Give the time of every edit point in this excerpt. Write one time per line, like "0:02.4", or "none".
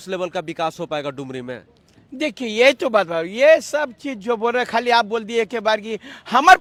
none